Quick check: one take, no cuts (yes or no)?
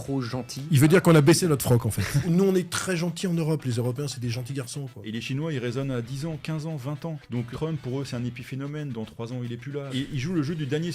no